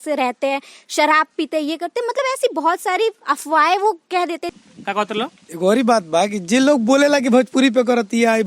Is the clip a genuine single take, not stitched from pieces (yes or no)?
no